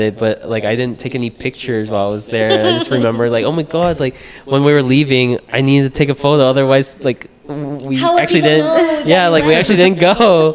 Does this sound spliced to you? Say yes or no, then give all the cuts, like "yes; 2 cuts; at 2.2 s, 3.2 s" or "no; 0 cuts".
no; 0 cuts